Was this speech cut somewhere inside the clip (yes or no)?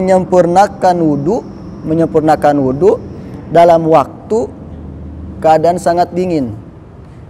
no